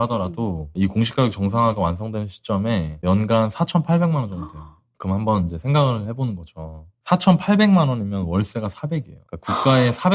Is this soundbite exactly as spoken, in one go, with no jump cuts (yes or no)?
yes